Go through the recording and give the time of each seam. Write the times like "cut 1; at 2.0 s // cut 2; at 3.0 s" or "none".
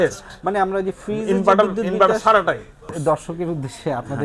none